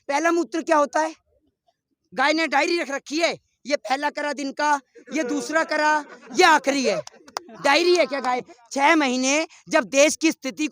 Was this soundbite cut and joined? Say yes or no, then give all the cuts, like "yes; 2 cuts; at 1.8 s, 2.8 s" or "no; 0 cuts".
yes; 1 cut; at 8.5 s